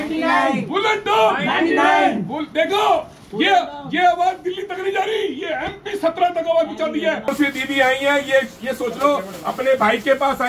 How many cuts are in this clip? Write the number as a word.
one